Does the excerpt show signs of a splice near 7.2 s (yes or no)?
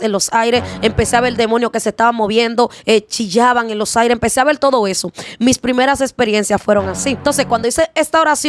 yes